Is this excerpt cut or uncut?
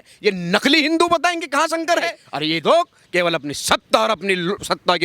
cut